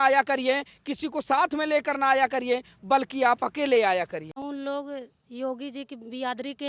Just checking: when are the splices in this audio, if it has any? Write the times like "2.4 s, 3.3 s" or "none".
4.4 s